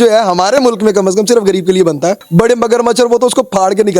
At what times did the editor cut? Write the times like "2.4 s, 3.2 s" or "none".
2.2 s